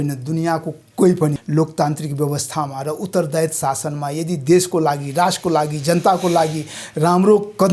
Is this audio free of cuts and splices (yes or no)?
no